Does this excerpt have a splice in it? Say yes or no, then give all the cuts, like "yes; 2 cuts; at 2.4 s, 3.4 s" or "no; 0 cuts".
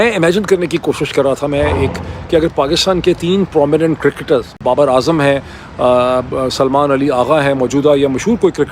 yes; 1 cut; at 4.5 s